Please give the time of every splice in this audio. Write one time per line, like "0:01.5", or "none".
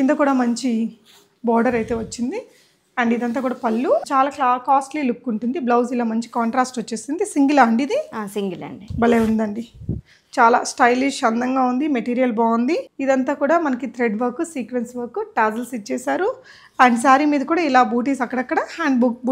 0:04.0
0:12.9